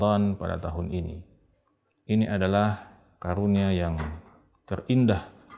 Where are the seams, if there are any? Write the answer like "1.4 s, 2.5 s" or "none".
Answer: none

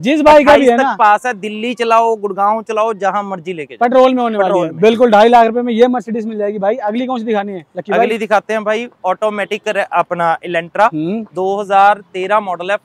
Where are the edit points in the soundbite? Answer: none

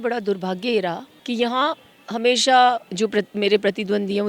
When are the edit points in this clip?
1.1 s, 2.9 s

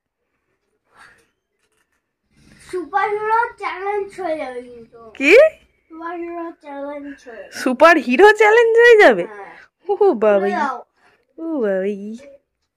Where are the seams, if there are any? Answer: none

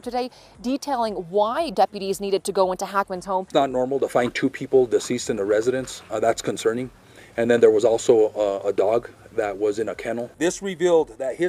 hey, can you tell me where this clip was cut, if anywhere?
3.5 s, 10.3 s

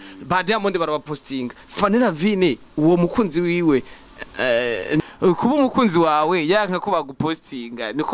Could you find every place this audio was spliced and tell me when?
5.0 s

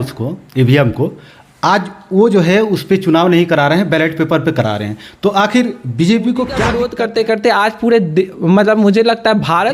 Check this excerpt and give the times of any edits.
6.8 s

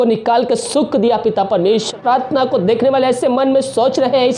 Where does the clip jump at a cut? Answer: 1.9 s

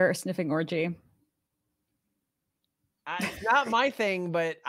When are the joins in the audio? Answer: none

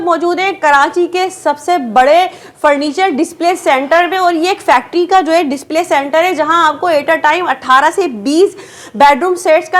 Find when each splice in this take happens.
none

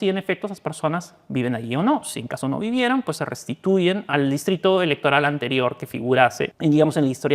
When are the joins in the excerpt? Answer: 4.1 s, 6.5 s

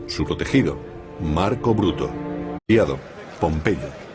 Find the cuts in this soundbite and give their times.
none

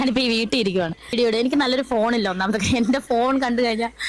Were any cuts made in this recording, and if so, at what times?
1.1 s

